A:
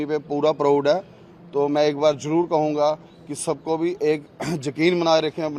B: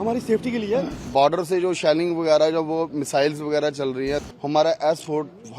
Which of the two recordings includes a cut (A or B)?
B